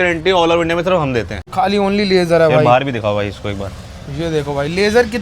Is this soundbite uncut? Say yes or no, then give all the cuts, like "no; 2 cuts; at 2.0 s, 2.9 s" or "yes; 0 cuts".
no; 1 cut; at 1.4 s